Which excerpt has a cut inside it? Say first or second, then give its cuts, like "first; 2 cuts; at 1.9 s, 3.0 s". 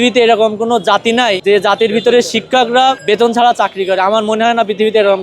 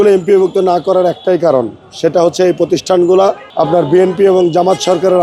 first; 2 cuts; at 1.4 s, 3.0 s